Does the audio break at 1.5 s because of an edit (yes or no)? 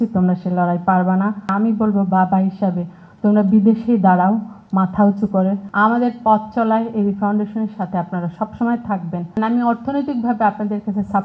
yes